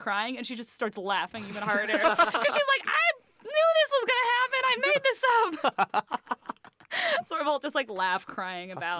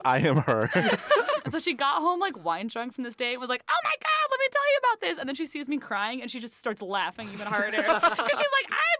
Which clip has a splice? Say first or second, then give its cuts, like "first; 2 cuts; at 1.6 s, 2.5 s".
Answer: second; 1 cut; at 1.3 s